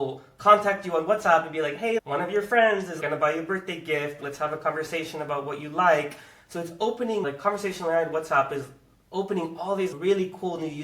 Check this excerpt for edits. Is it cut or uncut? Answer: cut